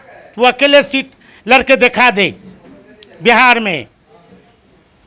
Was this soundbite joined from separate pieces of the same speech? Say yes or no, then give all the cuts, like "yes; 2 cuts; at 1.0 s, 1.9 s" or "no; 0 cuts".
no; 0 cuts